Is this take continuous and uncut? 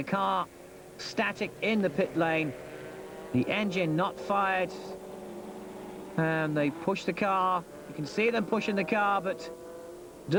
yes; 0 cuts

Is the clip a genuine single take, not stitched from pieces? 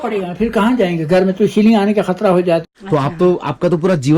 no; 1 cut; at 2.6 s

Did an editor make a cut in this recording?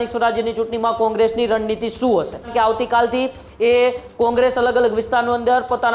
yes; 1 cut; at 2.5 s

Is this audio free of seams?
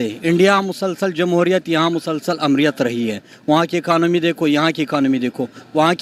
yes; 0 cuts

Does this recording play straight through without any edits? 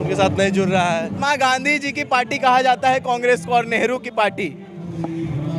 no; 1 cut; at 1.2 s

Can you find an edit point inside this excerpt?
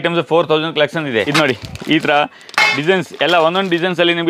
yes; 1 cut; at 1.3 s

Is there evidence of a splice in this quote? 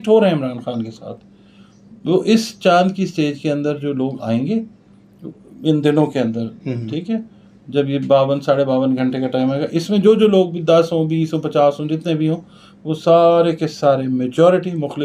no; 0 cuts

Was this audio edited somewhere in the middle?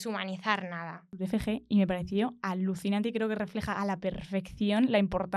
yes; 1 cut; at 1.2 s

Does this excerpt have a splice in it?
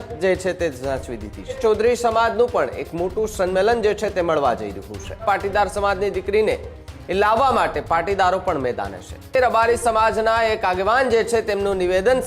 yes; 3 cuts; at 1.6 s, 5.2 s, 9.4 s

